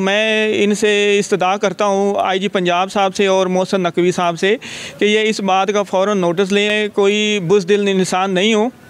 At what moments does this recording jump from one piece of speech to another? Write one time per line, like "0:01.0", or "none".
0:06.7